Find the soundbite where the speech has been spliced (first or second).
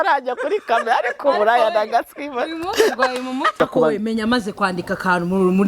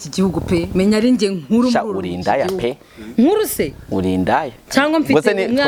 first